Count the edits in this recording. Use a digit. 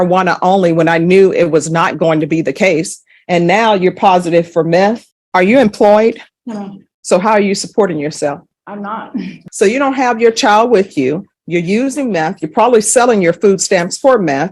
2